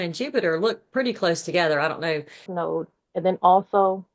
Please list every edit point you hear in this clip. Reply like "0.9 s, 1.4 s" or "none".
2.5 s

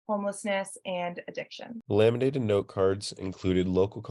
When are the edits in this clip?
1.8 s

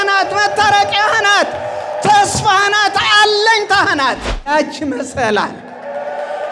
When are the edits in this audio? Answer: 4.5 s

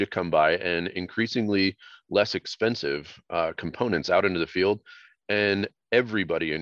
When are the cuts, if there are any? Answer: none

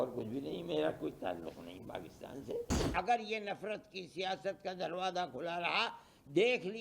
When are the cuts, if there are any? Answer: 2.9 s

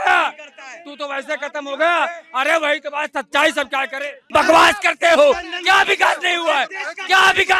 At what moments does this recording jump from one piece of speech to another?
4.2 s

